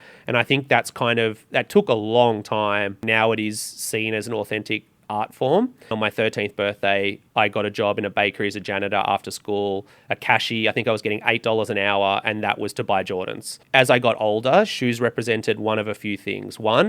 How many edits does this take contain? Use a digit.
3